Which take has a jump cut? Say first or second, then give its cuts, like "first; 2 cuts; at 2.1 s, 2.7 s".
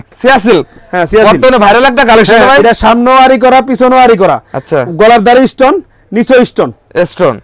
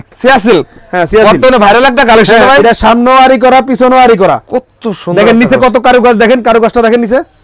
second; 1 cut; at 4.5 s